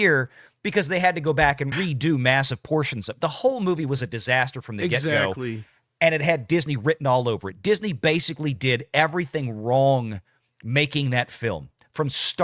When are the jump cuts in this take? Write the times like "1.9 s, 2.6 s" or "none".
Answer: 1.7 s